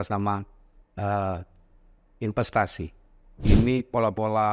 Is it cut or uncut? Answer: cut